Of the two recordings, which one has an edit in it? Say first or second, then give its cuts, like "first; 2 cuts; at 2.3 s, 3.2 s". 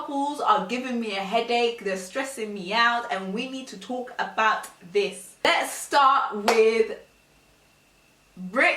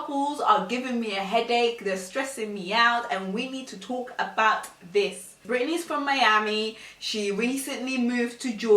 second; 1 cut; at 5.4 s